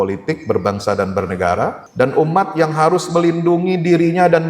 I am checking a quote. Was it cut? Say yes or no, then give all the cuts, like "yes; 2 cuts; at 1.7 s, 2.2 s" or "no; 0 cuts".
yes; 1 cut; at 1.8 s